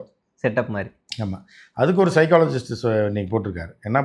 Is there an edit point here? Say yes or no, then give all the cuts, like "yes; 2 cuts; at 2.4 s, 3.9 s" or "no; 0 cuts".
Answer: no; 0 cuts